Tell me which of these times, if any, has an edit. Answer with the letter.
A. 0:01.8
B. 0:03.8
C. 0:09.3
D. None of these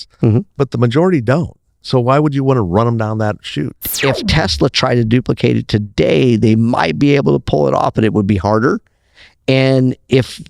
B